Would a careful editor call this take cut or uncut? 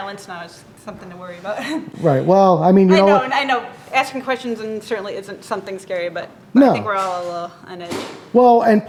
uncut